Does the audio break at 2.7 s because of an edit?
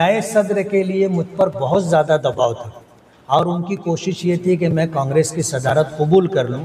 no; 0 cuts

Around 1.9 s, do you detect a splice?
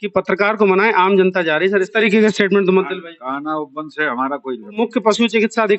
yes; 2 cuts; at 1.9 s, 4.8 s

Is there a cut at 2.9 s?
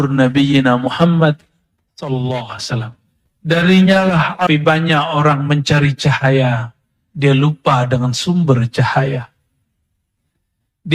no; 1 cut; at 4.5 s

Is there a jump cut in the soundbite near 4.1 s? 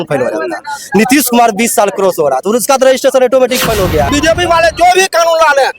yes; 1 cut; at 4.1 s

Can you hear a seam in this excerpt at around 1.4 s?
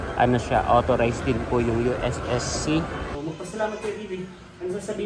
no; 1 cut; at 3.1 s

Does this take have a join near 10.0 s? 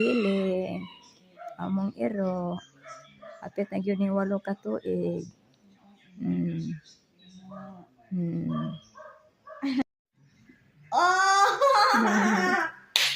yes; 1 cut; at 10.0 s

